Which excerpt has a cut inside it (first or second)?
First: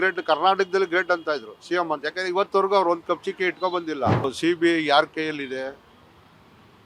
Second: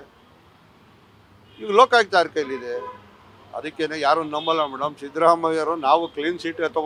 first